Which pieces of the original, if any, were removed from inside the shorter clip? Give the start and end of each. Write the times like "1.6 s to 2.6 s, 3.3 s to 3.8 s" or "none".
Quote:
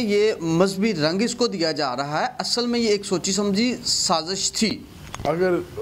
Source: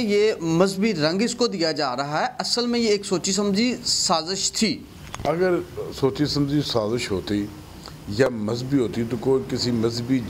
none